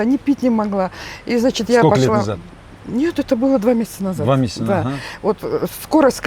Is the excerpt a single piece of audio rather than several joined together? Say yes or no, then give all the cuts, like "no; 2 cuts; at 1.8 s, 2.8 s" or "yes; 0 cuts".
yes; 0 cuts